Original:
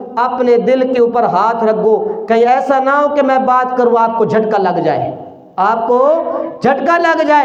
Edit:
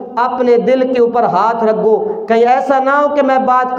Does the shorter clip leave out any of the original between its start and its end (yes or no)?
no